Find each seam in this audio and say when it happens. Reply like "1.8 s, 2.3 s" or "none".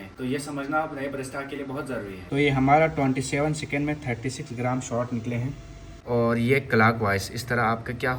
2.2 s, 6.0 s